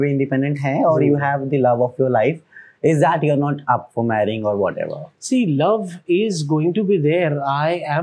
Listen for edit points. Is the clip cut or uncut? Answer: uncut